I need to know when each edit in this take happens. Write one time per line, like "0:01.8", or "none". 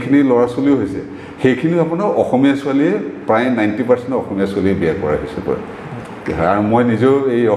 none

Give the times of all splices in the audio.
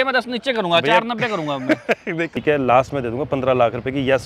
0:02.4

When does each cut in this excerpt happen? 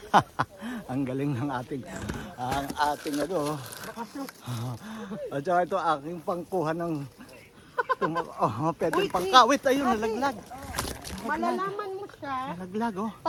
none

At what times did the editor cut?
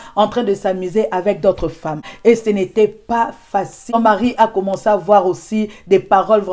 none

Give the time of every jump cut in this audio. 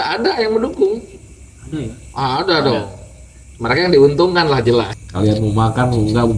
0:05.0

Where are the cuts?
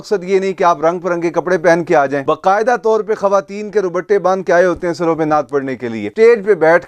0:02.2
0:06.1

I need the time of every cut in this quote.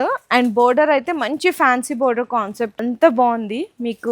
0:02.7

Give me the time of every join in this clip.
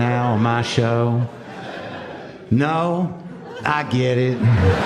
none

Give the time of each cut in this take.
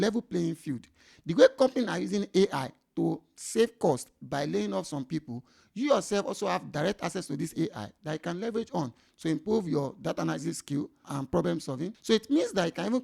0:11.0
0:12.0

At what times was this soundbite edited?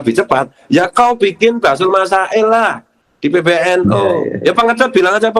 0:04.3

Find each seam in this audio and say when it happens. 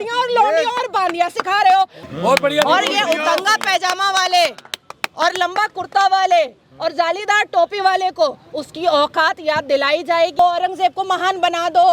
0:02.0
0:10.4

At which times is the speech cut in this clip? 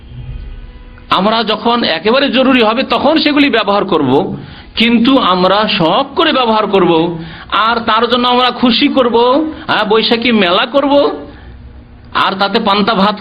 none

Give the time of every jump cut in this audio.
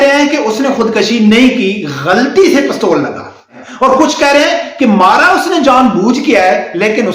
0:03.6

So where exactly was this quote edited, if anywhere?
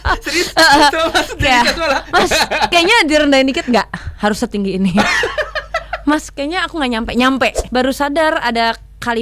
0:07.6

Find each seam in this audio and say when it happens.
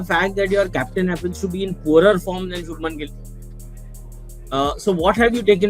none

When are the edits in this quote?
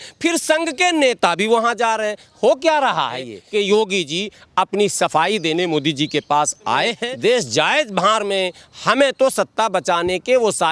0:03.4
0:07.0

